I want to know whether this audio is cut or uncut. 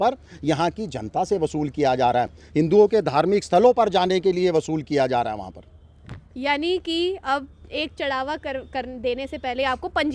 uncut